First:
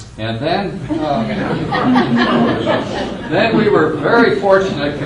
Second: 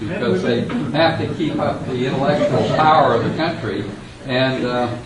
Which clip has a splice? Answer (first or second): first